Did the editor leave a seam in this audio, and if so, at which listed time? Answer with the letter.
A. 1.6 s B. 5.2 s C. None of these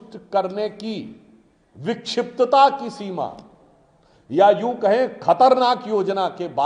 C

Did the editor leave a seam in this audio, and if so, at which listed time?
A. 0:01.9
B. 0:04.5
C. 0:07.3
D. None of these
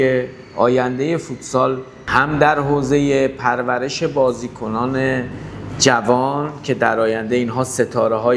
A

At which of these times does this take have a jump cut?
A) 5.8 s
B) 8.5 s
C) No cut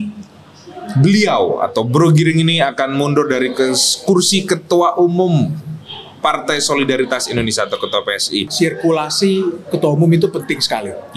B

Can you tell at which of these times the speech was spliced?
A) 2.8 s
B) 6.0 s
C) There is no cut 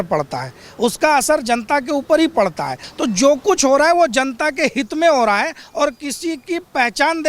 A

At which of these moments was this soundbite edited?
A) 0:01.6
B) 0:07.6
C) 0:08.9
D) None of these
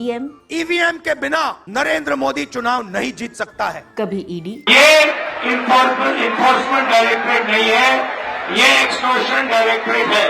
A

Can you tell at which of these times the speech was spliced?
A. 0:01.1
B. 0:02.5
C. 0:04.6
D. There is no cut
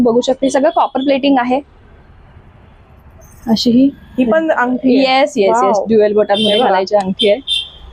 D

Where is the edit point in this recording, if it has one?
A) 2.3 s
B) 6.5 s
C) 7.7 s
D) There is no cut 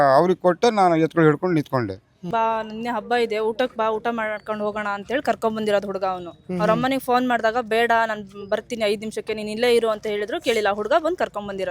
A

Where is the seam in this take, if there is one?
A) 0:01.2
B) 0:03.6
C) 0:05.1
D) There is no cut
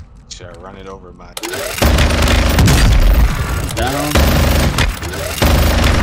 A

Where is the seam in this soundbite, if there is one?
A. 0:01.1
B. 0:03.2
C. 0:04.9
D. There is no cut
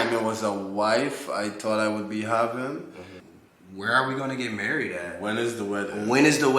B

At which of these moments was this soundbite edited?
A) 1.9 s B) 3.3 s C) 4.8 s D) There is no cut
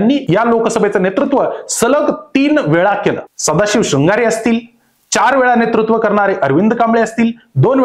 B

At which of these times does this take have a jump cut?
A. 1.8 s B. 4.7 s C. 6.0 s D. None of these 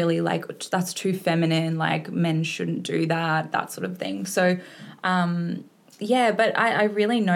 D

